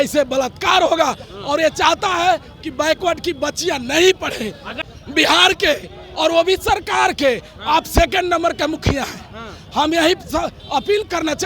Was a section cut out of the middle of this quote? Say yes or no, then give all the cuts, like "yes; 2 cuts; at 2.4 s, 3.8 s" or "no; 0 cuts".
yes; 1 cut; at 4.9 s